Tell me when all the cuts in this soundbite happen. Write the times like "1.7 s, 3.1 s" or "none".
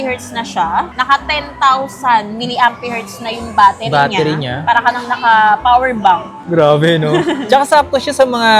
none

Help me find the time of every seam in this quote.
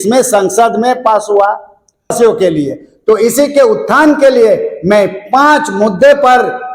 2.1 s

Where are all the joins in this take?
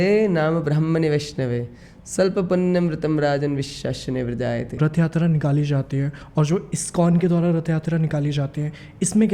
4.8 s

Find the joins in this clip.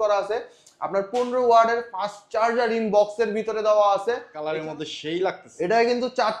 4.3 s

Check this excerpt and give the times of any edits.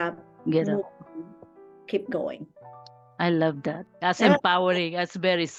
none

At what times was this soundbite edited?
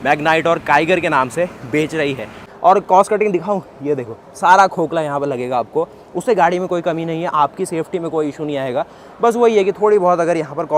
2.4 s

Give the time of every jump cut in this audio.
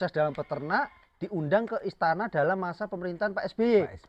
none

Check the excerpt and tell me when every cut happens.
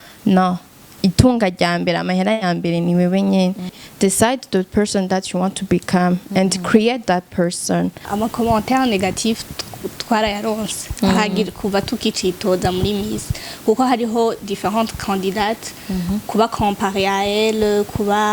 3.8 s, 8.1 s

